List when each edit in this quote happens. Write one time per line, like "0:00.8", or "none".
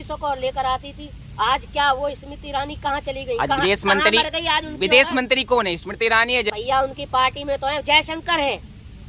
0:06.5